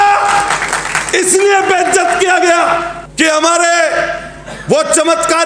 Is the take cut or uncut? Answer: cut